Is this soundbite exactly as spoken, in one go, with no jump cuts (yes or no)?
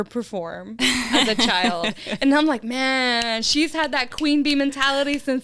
yes